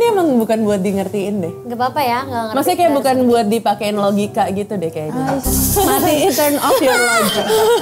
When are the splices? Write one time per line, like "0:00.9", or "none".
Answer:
none